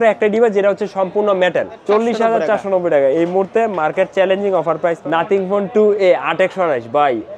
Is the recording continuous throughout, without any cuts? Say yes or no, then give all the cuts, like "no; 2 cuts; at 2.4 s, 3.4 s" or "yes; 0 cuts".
no; 2 cuts; at 1.8 s, 5.0 s